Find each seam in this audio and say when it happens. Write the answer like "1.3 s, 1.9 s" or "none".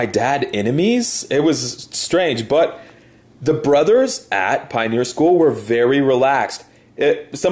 none